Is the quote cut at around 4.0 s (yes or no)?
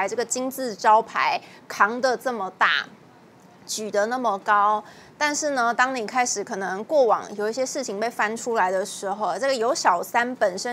no